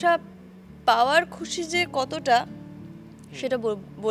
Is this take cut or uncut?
uncut